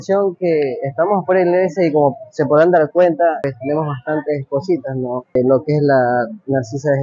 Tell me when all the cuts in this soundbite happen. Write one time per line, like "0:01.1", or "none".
0:03.4
0:05.3